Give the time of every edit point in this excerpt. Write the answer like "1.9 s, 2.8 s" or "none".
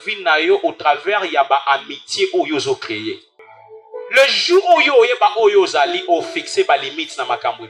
3.3 s